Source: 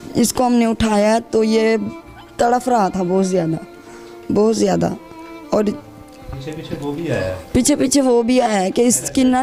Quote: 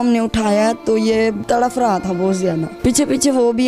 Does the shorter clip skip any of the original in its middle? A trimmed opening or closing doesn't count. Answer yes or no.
yes